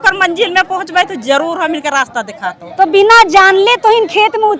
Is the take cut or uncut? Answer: uncut